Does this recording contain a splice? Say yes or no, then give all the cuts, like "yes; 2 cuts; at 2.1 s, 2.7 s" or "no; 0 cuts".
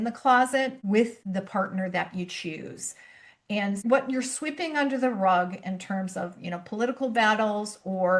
yes; 1 cut; at 3.8 s